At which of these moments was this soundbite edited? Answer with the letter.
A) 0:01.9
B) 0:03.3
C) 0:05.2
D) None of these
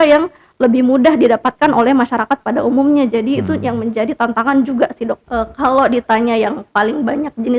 C